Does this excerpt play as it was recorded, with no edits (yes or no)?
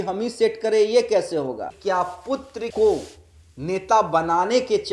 no